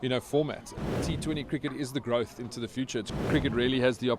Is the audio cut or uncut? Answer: cut